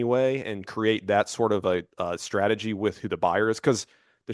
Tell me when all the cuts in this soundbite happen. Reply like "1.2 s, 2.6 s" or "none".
none